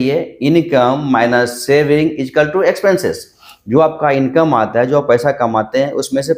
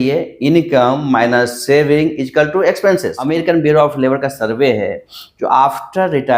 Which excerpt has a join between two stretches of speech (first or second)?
second